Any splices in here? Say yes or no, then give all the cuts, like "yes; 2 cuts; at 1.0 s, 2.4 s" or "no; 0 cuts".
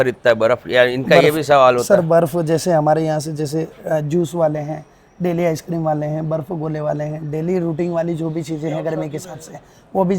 no; 0 cuts